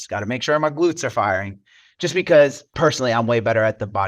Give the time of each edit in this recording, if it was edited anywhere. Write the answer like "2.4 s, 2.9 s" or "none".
2.7 s